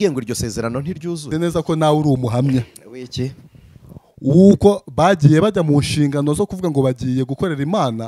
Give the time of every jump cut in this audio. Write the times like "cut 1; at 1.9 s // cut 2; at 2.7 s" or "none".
cut 1; at 1.3 s